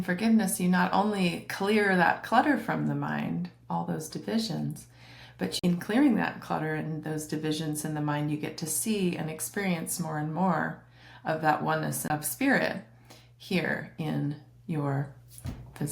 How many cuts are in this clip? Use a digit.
2